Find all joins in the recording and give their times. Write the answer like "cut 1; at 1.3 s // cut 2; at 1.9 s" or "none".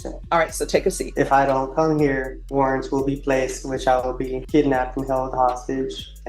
cut 1; at 1.0 s // cut 2; at 2.4 s // cut 3; at 4.4 s